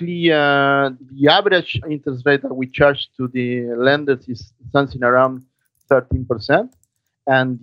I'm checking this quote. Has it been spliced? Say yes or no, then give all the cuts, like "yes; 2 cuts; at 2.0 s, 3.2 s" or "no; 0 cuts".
yes; 2 cuts; at 1.0 s, 1.9 s